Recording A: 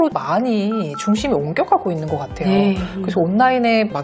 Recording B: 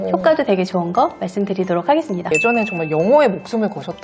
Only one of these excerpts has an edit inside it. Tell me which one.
B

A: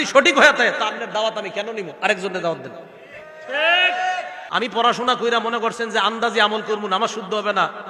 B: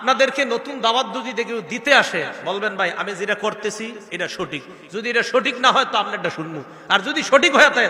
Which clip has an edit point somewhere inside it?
A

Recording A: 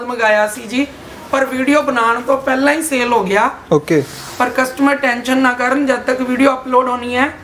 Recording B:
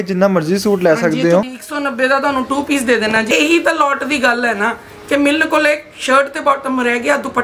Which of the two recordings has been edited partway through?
B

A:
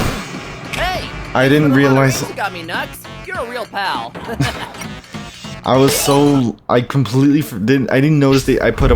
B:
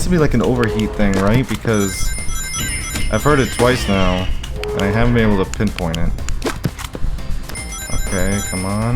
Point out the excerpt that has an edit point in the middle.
B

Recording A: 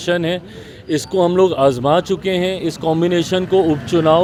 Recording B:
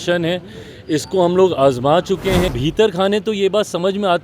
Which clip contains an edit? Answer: B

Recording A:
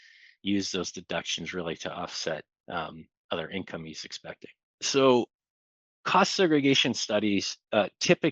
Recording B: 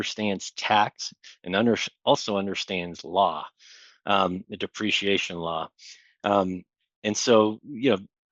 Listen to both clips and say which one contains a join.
A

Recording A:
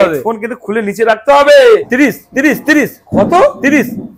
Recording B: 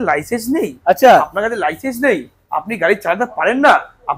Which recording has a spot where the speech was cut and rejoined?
A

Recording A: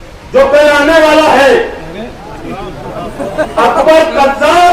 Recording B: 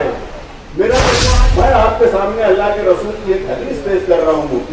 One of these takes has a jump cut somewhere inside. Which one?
B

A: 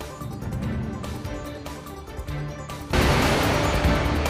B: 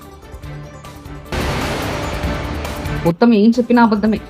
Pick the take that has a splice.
B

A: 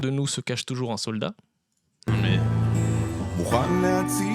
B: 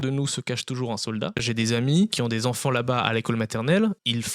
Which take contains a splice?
B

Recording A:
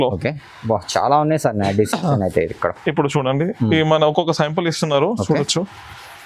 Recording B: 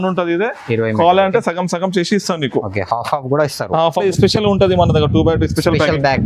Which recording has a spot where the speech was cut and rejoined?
B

